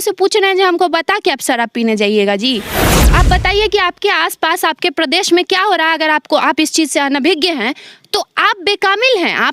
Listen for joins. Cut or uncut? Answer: cut